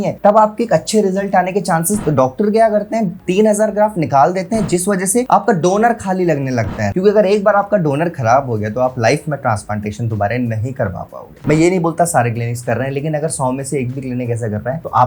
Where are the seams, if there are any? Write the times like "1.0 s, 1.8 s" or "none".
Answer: 2.0 s, 6.8 s, 11.3 s